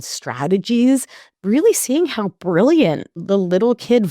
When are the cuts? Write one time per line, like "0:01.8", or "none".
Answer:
0:01.2
0:03.2